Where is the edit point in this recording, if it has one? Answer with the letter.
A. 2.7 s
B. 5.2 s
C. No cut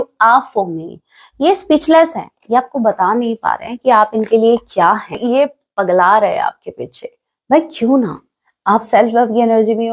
B